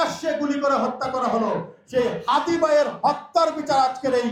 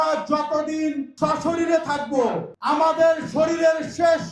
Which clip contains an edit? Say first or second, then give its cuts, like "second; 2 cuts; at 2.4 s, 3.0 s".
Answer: second; 2 cuts; at 1.1 s, 2.8 s